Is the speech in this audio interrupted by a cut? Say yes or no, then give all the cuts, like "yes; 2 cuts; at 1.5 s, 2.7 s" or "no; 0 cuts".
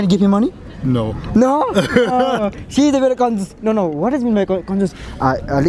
no; 0 cuts